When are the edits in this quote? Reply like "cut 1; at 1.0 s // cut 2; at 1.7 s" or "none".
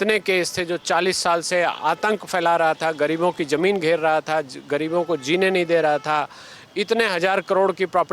none

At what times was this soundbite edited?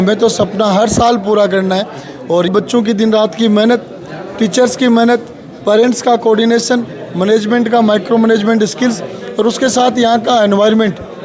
cut 1; at 2.5 s

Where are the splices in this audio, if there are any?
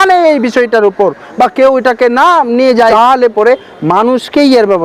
cut 1; at 2.9 s

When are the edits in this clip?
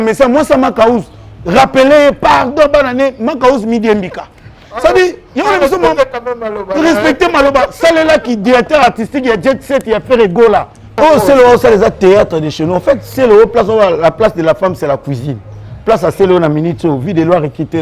cut 1; at 11.0 s

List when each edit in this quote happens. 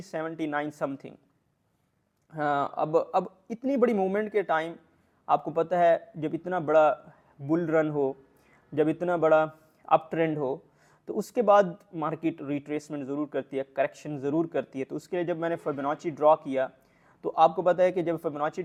none

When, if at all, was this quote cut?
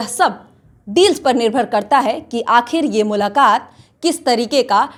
none

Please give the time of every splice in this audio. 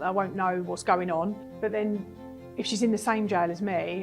cut 1; at 1.5 s

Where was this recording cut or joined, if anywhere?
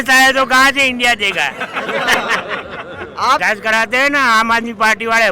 cut 1; at 3.4 s

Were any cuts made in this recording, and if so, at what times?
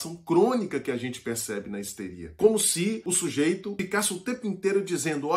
cut 1; at 2.4 s // cut 2; at 3.0 s // cut 3; at 3.8 s

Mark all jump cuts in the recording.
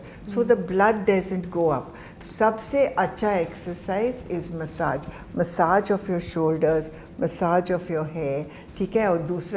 cut 1; at 2.1 s

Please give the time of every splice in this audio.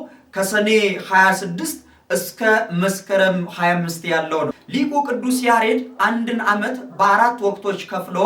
cut 1; at 4.6 s

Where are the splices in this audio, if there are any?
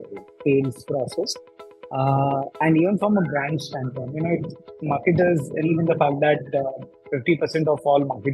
cut 1; at 5.7 s

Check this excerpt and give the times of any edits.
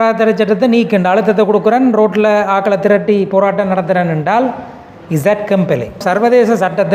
cut 1; at 6.0 s

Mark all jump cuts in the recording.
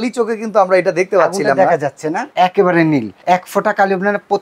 cut 1; at 2.2 s // cut 2; at 3.1 s

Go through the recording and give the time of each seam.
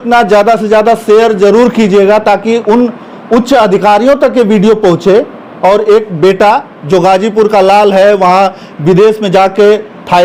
none

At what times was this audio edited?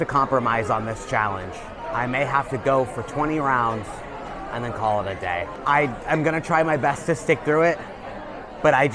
none

